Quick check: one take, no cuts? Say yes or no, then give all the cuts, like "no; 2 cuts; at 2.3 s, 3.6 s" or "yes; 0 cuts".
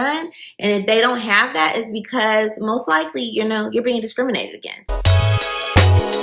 no; 1 cut; at 4.8 s